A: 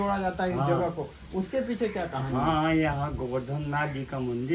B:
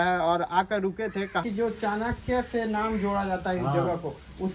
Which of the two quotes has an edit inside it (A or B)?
B